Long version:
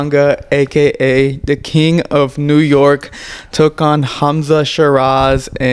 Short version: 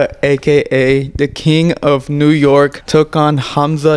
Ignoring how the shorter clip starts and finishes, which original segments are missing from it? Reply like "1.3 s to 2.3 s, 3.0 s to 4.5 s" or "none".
3.1 s to 3.4 s